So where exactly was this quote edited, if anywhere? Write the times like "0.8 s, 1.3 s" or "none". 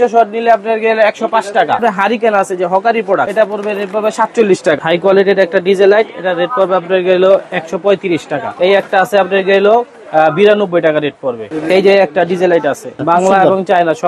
1.8 s, 3.3 s, 4.8 s, 8.4 s, 11.4 s, 12.9 s